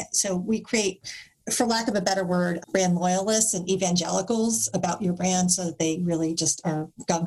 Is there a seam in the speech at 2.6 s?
yes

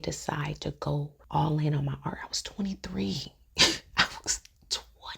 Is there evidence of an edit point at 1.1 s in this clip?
yes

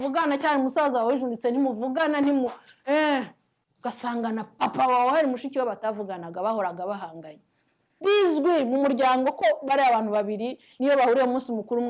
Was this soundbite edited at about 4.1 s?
no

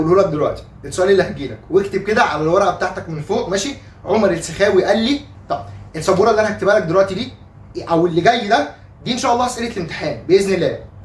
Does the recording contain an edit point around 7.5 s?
no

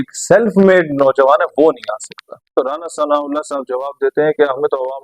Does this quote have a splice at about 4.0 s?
no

